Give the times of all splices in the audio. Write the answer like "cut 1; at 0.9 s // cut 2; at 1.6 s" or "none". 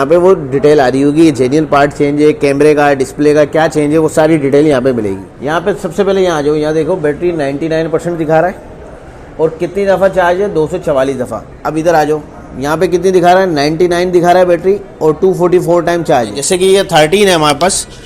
cut 1; at 5.3 s // cut 2; at 16.4 s

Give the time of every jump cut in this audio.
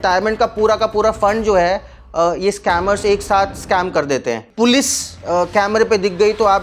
cut 1; at 4.5 s

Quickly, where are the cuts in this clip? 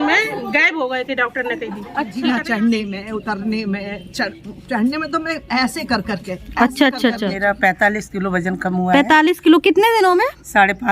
cut 1; at 2.1 s // cut 2; at 7.3 s

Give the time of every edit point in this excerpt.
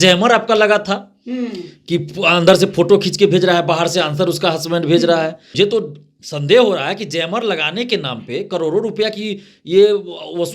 cut 1; at 5.4 s

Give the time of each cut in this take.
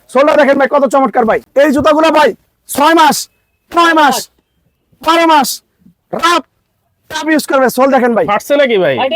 cut 1; at 1.5 s

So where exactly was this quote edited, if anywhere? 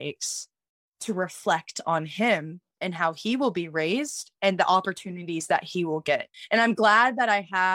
cut 1; at 6.3 s

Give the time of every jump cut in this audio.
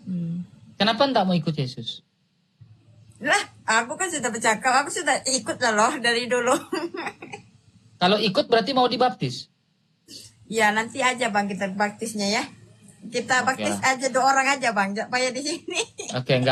none

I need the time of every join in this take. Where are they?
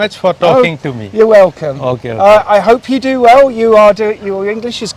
none

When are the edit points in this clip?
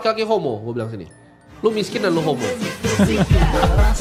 none

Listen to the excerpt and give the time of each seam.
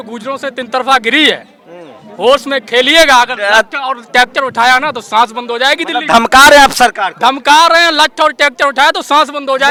none

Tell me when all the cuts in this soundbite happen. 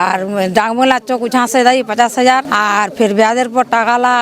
cut 1; at 2.5 s

